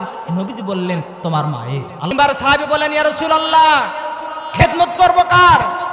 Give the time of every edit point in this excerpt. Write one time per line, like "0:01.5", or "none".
0:02.1